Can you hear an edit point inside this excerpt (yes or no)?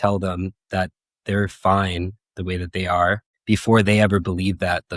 yes